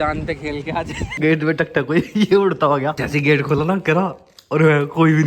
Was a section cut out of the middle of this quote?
yes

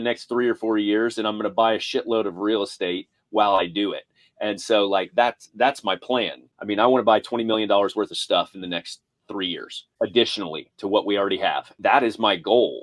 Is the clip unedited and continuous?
no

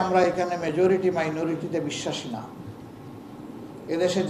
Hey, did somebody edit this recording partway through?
no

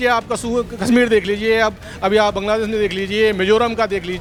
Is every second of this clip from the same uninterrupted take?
yes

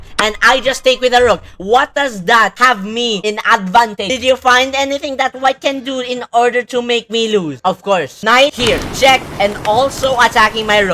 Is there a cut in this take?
yes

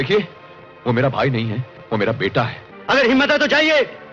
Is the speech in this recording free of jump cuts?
no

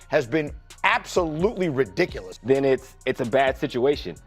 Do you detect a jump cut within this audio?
yes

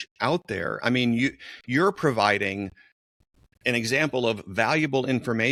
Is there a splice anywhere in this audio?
no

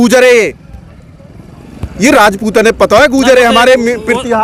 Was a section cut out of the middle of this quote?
no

